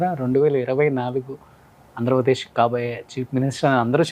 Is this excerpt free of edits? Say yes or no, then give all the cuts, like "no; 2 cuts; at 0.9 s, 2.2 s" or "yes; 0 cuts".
yes; 0 cuts